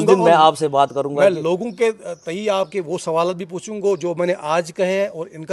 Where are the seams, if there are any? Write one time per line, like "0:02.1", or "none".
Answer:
none